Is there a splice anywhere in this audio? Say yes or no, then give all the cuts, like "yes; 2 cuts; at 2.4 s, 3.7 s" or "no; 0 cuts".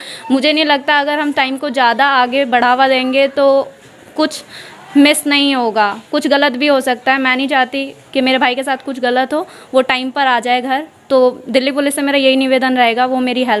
no; 0 cuts